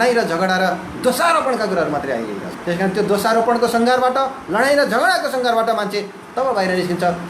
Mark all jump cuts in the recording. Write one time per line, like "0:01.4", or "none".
0:02.5